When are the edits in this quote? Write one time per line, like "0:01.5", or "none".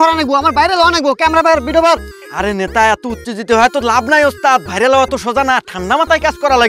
none